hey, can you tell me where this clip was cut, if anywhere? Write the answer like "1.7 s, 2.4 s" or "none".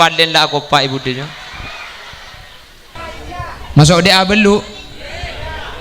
3.0 s